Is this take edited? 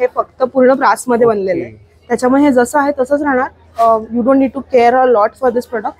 no; 0 cuts

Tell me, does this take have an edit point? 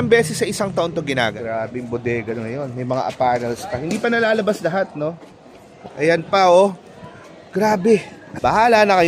yes; 1 cut; at 1.3 s

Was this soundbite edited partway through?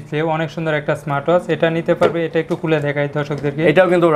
no; 0 cuts

